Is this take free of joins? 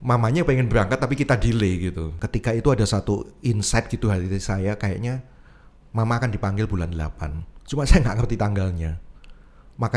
no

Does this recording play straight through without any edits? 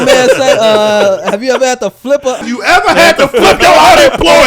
no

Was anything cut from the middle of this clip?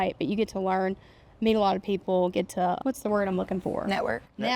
yes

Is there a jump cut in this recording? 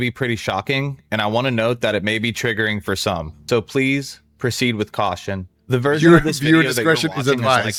no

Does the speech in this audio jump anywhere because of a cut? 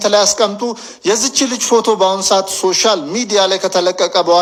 no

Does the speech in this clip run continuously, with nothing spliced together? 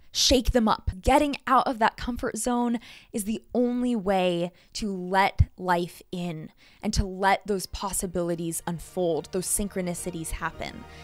no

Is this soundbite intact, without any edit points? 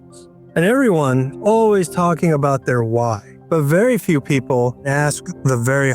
no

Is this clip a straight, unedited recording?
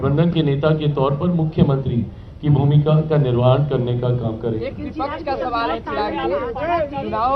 yes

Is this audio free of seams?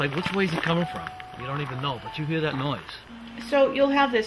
yes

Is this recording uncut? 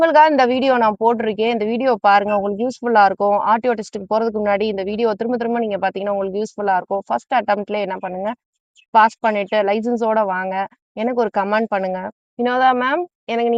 yes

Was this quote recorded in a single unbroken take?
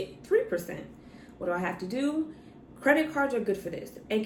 yes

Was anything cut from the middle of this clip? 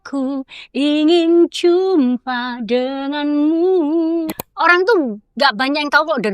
yes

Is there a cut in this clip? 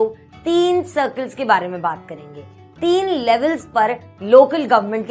no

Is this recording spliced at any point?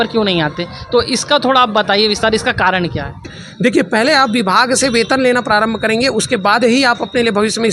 yes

